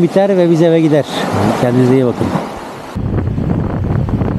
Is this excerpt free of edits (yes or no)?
no